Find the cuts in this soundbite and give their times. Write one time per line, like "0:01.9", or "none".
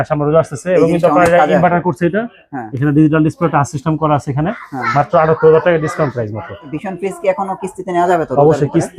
0:06.7